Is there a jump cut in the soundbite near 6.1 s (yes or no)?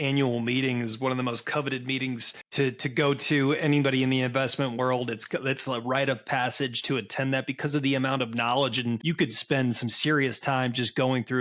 no